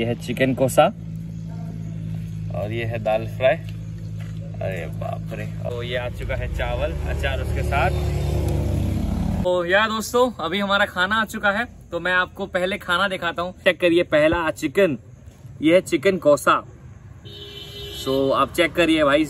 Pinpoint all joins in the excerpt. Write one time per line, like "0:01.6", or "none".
0:05.6
0:09.5
0:13.6